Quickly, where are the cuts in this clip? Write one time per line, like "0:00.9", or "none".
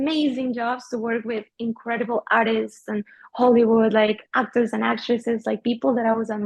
none